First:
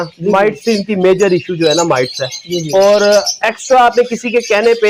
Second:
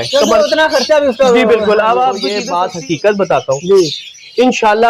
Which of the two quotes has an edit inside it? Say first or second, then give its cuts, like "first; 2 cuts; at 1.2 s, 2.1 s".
second; 1 cut; at 2.4 s